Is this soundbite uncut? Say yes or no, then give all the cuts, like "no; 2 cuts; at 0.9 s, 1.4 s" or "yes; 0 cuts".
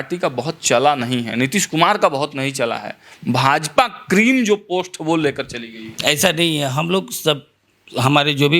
yes; 0 cuts